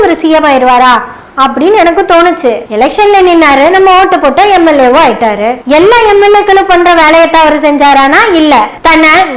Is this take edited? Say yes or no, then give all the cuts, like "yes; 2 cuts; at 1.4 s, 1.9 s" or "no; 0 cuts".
no; 0 cuts